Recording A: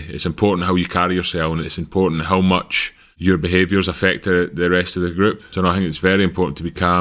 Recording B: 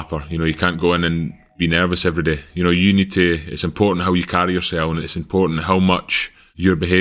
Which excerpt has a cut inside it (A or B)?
A